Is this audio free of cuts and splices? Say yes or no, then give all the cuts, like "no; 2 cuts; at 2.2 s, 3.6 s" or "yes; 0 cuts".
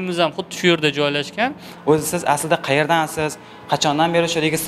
no; 1 cut; at 1.7 s